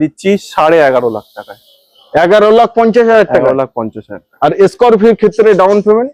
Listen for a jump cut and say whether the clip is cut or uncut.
uncut